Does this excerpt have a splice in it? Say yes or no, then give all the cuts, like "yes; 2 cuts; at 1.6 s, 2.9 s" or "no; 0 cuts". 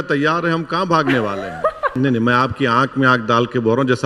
yes; 1 cut; at 1.9 s